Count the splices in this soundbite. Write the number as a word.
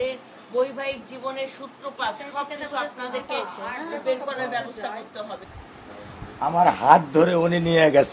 one